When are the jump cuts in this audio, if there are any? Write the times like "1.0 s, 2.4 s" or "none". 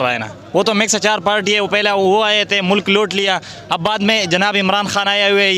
none